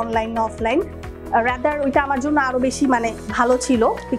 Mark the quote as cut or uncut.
uncut